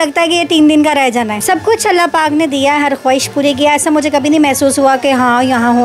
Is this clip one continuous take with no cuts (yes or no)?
yes